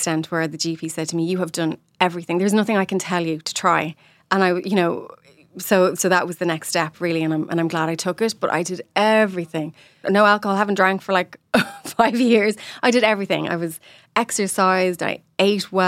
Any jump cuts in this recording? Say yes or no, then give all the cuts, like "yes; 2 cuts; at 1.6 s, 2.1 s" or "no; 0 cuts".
yes; 1 cut; at 10.0 s